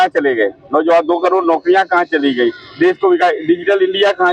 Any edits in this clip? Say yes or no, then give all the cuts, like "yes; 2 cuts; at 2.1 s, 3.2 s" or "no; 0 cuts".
no; 0 cuts